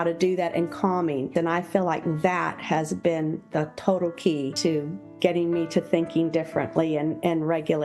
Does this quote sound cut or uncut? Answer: cut